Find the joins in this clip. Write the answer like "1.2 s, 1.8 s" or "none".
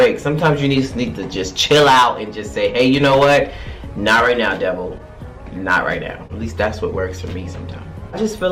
none

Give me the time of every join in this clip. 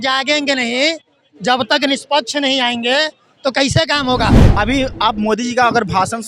4.4 s

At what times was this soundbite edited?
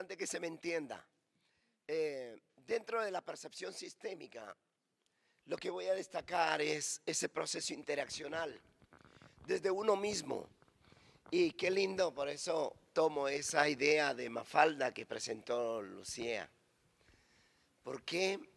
14.8 s

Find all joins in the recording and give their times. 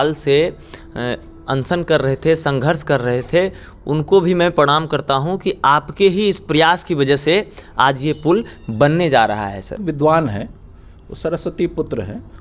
9.8 s

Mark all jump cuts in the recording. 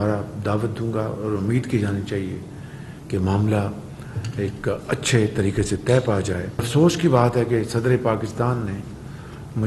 6.7 s

